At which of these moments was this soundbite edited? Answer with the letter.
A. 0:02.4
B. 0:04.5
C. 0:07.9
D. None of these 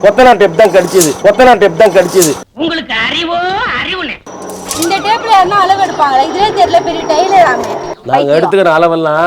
C